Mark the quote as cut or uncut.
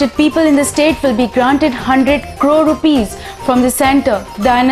uncut